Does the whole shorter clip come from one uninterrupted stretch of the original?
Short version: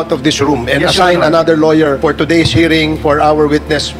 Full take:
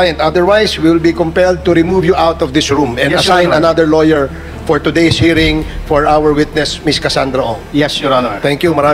no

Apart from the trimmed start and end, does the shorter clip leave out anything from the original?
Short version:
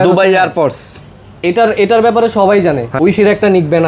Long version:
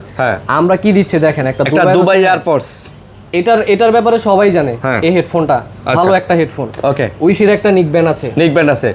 yes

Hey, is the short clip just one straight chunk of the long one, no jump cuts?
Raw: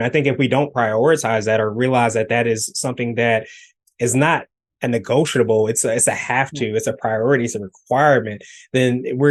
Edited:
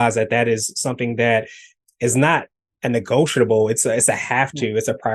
yes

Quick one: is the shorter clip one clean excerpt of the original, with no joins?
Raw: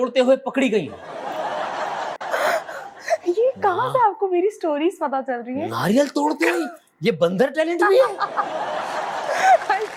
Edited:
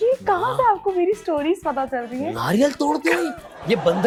yes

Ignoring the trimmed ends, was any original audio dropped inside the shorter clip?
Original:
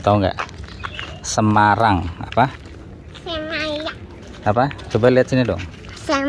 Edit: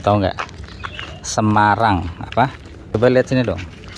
yes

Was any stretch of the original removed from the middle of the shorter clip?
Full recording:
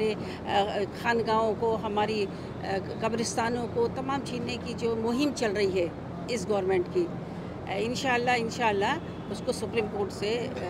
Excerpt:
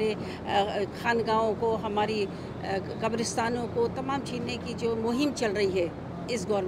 no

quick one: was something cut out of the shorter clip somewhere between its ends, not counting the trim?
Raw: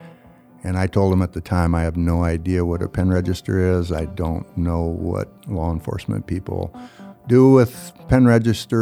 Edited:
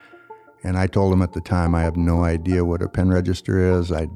no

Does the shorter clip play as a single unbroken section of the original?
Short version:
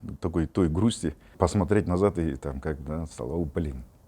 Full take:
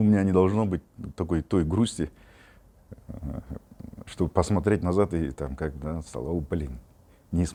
no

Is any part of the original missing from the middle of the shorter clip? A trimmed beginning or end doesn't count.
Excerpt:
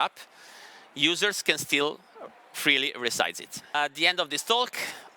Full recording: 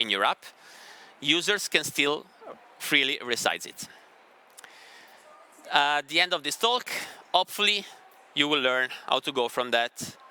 yes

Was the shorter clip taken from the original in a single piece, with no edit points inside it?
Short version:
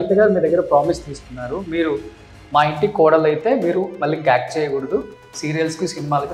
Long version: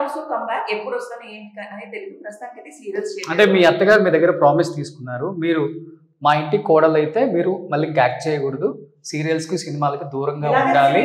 yes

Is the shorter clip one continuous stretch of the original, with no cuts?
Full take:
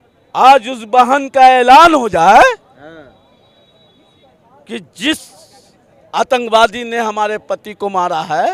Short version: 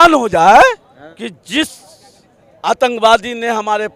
no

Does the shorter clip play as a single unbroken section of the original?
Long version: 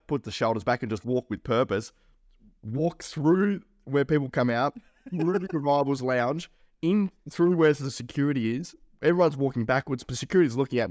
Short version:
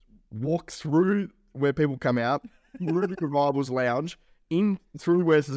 yes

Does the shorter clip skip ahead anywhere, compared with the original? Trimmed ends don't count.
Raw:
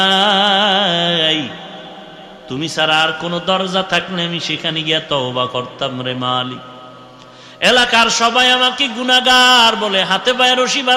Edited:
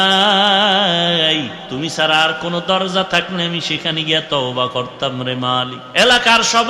yes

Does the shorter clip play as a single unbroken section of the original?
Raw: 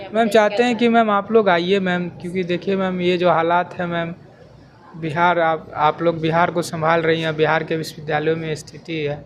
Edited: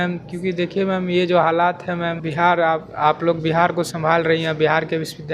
no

